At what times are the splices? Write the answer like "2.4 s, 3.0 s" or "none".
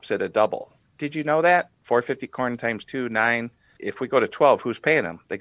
1.8 s, 3.7 s